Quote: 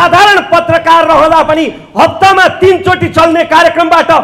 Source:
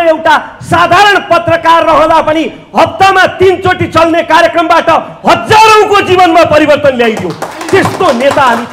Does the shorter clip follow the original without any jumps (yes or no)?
yes